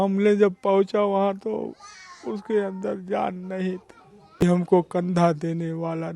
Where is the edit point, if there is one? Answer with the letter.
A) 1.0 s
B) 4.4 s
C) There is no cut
B